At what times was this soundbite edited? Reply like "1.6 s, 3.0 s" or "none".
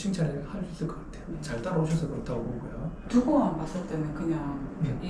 none